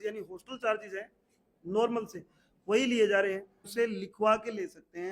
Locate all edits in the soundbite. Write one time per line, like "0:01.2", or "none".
0:03.7